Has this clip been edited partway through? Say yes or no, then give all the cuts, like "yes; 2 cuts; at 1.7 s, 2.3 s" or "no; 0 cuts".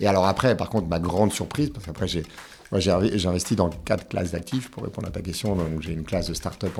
no; 0 cuts